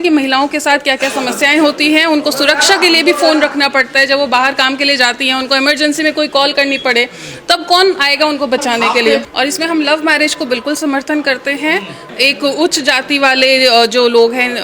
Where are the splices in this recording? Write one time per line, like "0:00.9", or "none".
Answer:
0:09.3
0:12.1